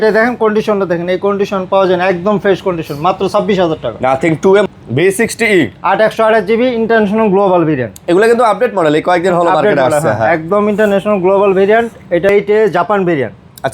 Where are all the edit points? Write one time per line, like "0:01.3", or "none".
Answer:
0:04.7
0:12.3